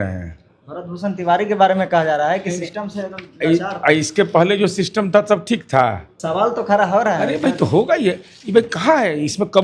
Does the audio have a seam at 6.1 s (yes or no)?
yes